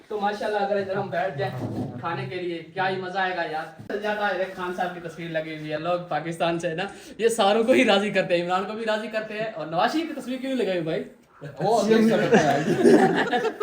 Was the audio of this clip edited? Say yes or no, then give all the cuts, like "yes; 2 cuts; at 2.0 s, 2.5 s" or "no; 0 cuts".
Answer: yes; 1 cut; at 3.9 s